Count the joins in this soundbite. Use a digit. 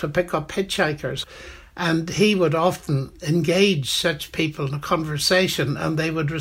1